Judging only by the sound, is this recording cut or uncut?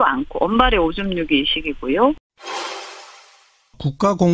cut